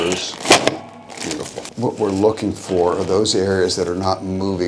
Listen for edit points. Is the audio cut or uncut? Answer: cut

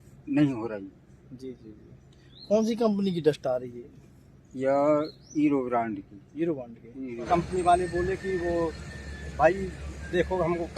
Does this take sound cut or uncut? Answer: cut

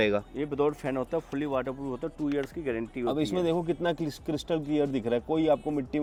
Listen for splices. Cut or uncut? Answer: uncut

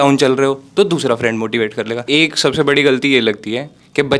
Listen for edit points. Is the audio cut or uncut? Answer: cut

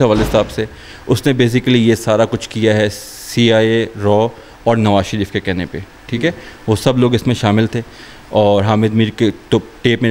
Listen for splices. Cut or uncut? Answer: uncut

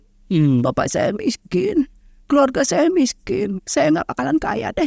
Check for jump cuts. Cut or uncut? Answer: uncut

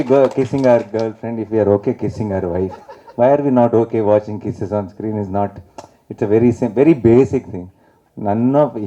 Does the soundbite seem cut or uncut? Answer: uncut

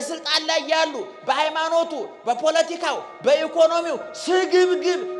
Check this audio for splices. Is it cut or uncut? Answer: uncut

